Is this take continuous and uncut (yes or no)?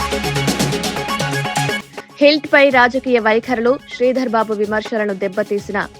no